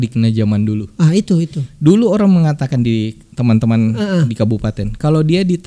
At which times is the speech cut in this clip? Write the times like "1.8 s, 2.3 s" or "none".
none